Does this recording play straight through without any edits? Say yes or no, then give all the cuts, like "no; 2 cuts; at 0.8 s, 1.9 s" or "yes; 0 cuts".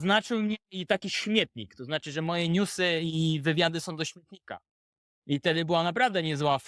yes; 0 cuts